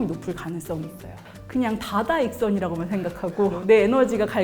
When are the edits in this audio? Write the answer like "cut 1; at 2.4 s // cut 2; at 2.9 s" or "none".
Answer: cut 1; at 1.3 s